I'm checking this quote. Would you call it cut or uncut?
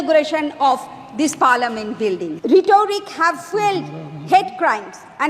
cut